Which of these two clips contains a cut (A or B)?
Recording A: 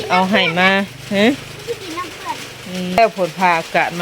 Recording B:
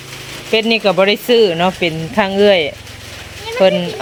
A